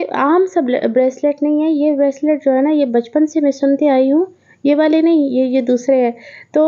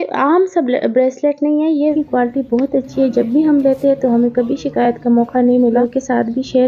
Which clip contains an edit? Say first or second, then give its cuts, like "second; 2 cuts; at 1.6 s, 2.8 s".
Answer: second; 2 cuts; at 1.9 s, 5.8 s